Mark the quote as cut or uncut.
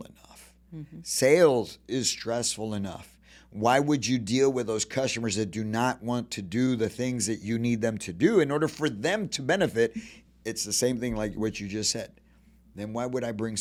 uncut